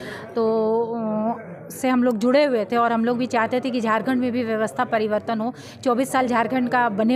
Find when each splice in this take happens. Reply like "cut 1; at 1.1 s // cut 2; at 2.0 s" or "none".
none